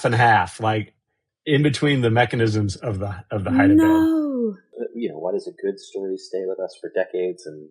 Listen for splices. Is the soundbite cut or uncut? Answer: cut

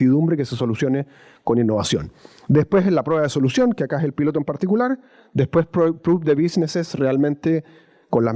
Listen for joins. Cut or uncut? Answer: uncut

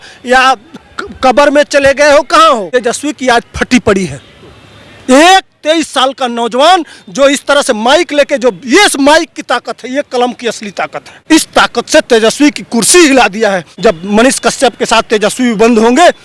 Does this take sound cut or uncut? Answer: cut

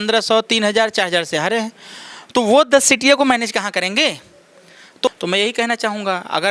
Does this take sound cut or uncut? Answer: cut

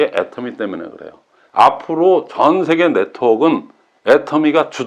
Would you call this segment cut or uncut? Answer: cut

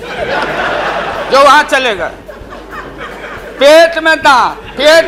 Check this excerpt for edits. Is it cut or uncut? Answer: uncut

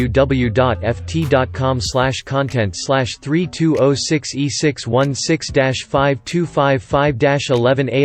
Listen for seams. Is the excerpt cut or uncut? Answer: uncut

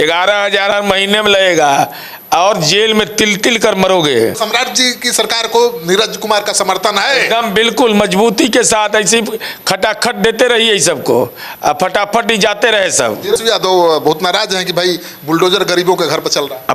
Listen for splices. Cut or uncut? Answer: cut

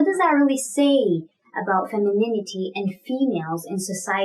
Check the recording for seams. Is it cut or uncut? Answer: uncut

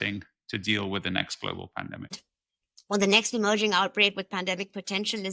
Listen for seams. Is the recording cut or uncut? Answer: cut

